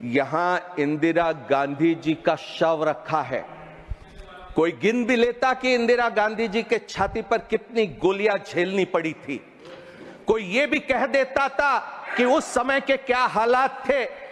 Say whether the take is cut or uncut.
uncut